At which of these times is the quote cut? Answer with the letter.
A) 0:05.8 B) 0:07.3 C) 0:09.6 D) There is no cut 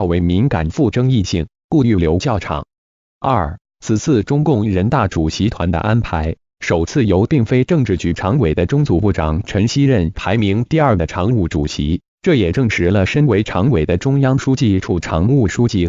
C